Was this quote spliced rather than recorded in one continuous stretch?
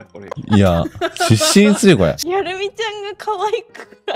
yes; 1 cut; at 2.2 s

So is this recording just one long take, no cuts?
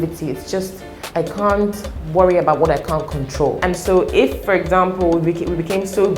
no; 1 cut; at 3.6 s

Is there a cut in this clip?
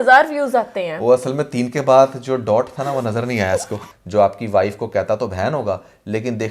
yes; 1 cut; at 3.9 s

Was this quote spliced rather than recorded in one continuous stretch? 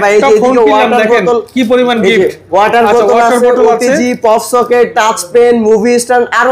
no; 0 cuts

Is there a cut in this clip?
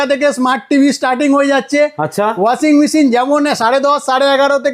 no; 0 cuts

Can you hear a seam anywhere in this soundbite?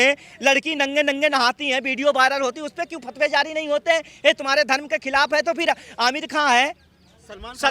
no; 0 cuts

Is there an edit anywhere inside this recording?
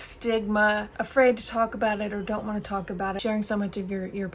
yes; 2 cuts; at 1.0 s, 3.2 s

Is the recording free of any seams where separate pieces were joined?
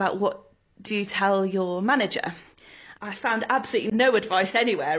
no; 2 cuts; at 2.8 s, 3.9 s

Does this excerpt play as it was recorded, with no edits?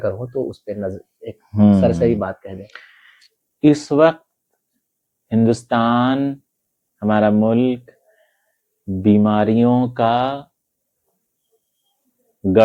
yes; 0 cuts

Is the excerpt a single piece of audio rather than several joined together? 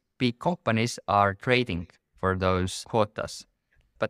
yes; 0 cuts

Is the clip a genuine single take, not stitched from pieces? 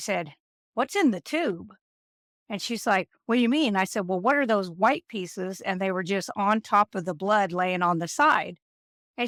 yes; 0 cuts

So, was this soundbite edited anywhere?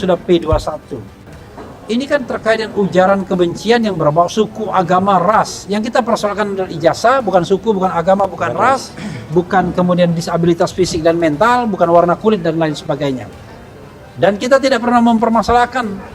yes; 1 cut; at 1.3 s

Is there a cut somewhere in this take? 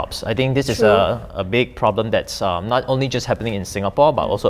no; 0 cuts

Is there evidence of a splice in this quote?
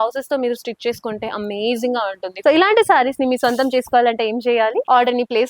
yes; 1 cut; at 2.4 s

